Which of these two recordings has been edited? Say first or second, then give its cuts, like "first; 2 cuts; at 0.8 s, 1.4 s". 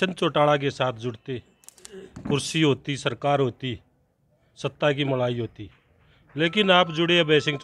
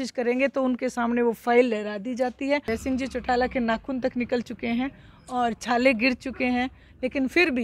second; 1 cut; at 2.7 s